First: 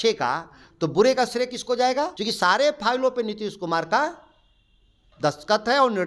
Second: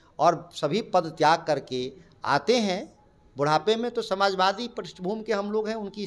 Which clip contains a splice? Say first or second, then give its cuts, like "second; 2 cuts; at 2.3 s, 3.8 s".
first; 1 cut; at 2.2 s